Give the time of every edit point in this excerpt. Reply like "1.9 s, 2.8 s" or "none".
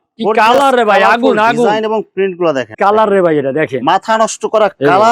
2.7 s